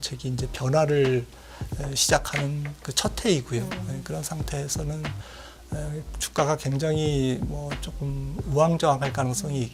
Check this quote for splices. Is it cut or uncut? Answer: uncut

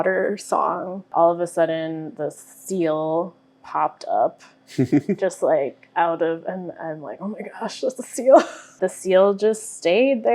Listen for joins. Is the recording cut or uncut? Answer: cut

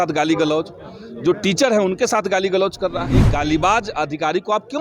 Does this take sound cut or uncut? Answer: cut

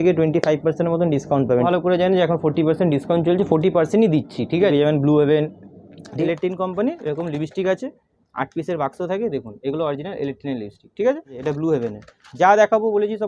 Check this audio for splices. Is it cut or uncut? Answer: cut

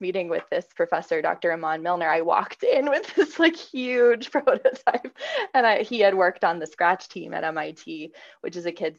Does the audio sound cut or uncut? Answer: uncut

